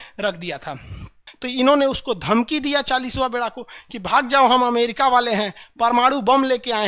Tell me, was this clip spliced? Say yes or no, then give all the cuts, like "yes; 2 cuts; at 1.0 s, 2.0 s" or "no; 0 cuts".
yes; 1 cut; at 1.2 s